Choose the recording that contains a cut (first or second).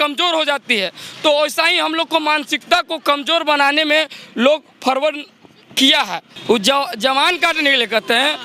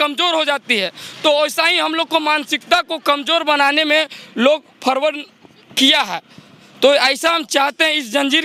first